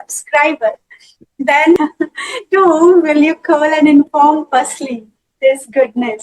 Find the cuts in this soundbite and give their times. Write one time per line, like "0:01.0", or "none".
0:01.8

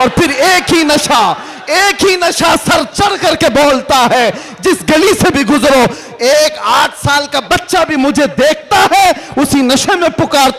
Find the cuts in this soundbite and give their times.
none

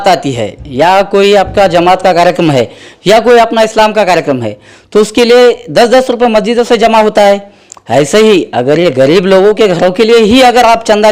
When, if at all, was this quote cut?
none

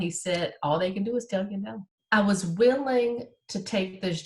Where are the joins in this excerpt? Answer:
0:01.9

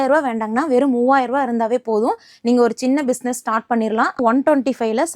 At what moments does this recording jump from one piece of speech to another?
0:04.2

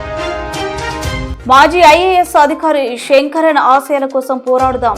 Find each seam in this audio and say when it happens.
0:01.3

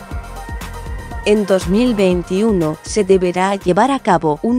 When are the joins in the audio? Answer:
0:01.1
0:02.5

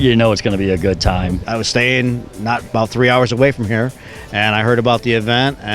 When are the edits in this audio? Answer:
0:01.5

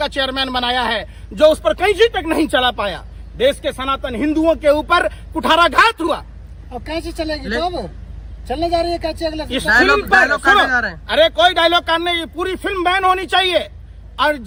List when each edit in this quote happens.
none

